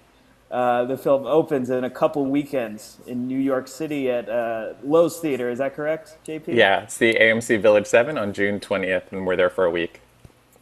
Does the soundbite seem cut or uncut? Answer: cut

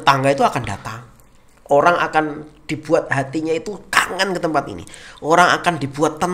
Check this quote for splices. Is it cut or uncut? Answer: uncut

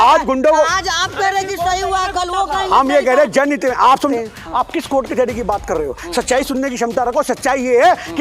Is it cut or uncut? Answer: cut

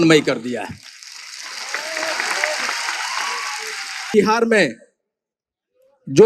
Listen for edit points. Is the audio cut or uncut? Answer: cut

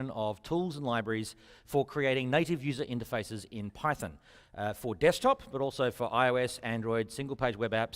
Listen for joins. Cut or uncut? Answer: cut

